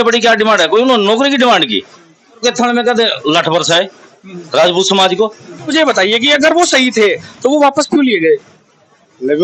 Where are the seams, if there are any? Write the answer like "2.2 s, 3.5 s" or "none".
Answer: 2.4 s, 5.7 s